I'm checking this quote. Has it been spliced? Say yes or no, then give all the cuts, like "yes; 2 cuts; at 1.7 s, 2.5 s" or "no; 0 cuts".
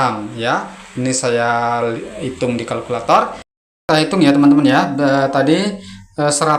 yes; 1 cut; at 3.6 s